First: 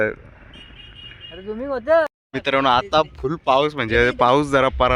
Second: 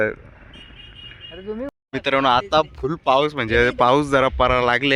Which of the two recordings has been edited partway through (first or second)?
second